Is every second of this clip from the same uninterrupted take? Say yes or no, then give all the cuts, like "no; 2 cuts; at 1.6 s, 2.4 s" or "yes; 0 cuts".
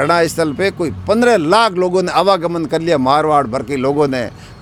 yes; 0 cuts